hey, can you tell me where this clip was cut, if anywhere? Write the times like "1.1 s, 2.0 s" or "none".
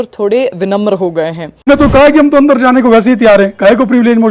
1.7 s